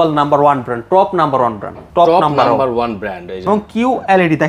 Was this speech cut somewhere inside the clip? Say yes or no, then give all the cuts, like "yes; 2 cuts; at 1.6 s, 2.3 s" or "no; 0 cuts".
yes; 2 cuts; at 1.7 s, 3.5 s